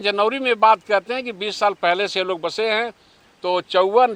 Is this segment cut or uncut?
uncut